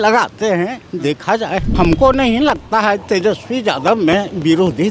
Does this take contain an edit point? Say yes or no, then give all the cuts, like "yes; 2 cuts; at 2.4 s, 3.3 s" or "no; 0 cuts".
yes; 1 cut; at 1.7 s